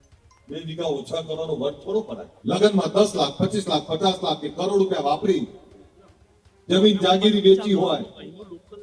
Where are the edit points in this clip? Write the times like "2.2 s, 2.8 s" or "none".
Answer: 2.2 s

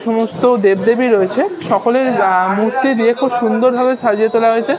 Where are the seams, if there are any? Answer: none

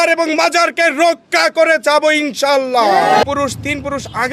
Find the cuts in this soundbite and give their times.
3.3 s

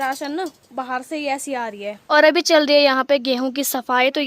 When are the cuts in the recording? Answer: 2.0 s

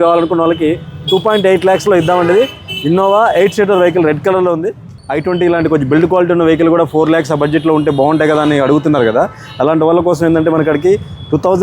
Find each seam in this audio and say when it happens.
5.0 s

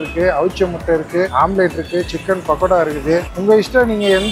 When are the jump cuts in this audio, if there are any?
3.3 s

